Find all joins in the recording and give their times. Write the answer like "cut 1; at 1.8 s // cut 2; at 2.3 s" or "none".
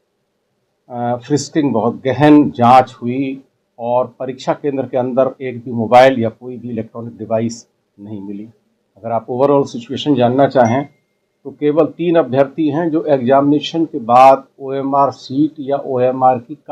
none